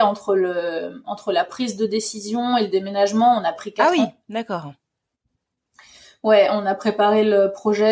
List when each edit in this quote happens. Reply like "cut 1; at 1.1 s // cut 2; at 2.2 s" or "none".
none